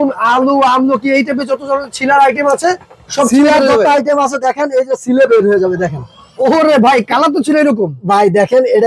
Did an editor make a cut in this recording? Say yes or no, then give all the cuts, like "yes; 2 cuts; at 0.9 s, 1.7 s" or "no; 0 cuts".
no; 0 cuts